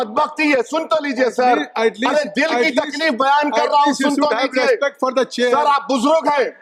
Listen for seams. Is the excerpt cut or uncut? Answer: uncut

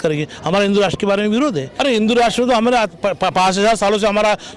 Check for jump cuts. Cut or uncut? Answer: cut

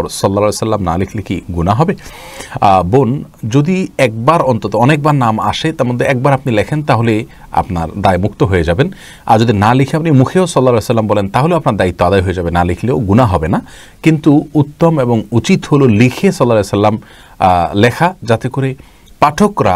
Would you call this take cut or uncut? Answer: uncut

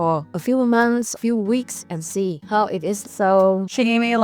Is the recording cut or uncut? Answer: cut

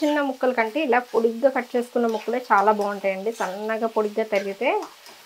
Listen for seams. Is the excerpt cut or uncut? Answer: uncut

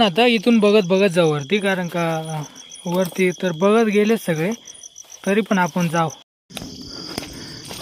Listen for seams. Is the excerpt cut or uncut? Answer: cut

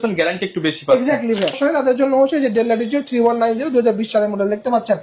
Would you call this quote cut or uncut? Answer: cut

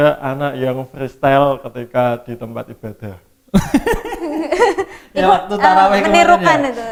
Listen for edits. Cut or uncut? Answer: uncut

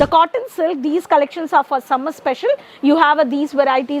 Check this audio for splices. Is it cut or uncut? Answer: uncut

